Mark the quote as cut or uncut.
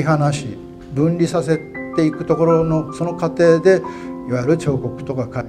uncut